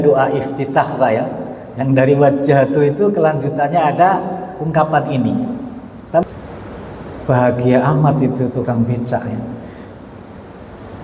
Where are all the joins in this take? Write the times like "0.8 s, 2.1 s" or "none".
6.2 s

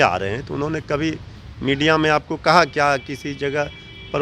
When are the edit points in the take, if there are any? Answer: none

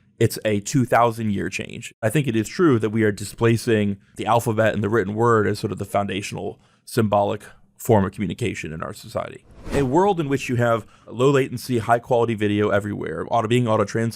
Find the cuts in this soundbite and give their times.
2.0 s, 4.1 s, 9.7 s, 11.1 s

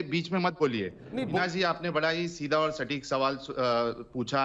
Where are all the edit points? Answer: 1.4 s

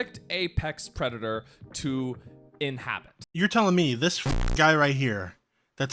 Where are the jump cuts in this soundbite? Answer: 3.2 s

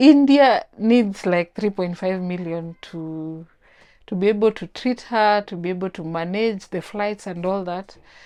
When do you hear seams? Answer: none

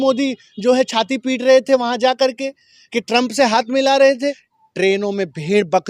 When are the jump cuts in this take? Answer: 4.5 s

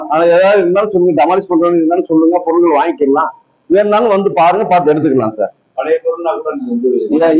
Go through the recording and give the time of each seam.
none

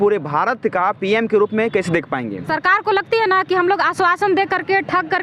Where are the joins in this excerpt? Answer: 2.4 s

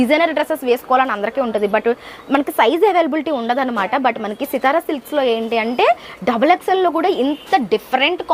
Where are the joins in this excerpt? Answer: none

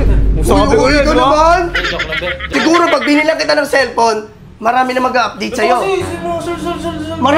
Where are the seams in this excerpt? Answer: 2.5 s

